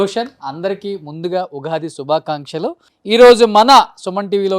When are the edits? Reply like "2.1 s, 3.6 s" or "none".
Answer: 2.9 s